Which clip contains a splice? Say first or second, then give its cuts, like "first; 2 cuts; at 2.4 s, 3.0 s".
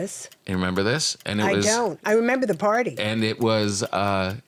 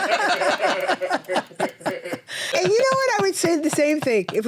second; 1 cut; at 2.5 s